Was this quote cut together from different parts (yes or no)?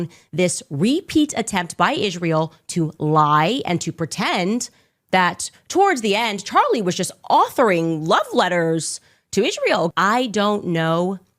yes